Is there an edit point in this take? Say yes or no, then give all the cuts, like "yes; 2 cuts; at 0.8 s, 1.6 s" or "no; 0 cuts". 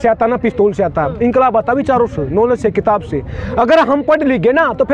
no; 0 cuts